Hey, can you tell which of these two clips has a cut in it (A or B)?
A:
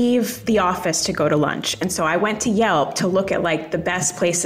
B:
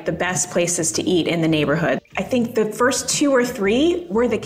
B